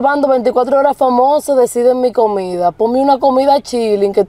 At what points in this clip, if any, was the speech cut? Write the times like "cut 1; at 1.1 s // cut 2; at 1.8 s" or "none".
none